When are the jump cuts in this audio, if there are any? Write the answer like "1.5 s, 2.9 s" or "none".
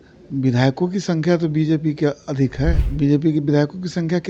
2.8 s